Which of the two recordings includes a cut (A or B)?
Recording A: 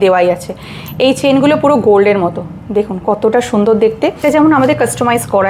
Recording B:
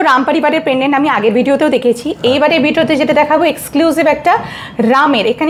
A